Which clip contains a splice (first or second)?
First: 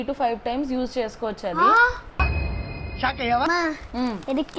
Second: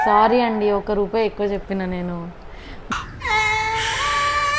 first